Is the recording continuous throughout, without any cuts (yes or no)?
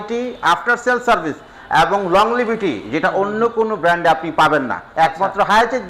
yes